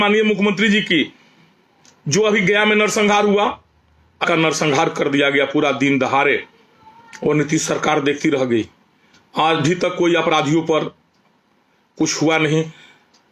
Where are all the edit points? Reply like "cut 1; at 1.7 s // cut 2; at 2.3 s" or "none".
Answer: cut 1; at 4.2 s